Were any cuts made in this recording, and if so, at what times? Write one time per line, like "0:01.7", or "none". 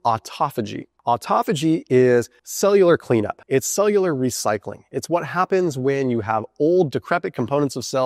0:02.4
0:03.4